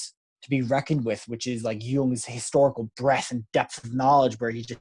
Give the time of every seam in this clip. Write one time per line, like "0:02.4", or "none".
none